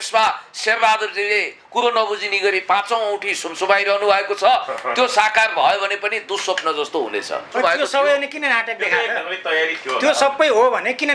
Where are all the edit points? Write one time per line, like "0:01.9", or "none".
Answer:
0:07.5